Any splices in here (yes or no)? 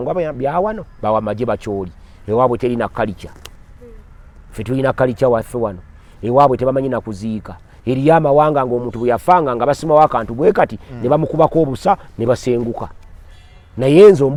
no